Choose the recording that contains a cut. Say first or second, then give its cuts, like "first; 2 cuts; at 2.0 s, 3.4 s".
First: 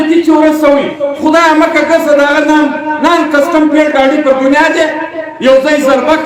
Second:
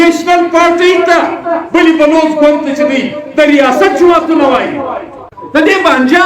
second; 1 cut; at 5.2 s